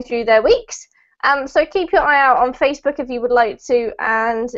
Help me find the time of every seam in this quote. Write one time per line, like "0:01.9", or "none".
none